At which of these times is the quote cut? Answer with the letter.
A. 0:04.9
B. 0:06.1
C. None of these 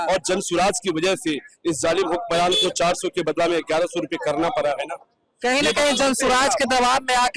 C